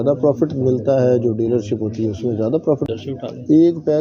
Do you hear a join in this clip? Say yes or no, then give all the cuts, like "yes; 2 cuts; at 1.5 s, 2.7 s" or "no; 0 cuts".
yes; 1 cut; at 2.8 s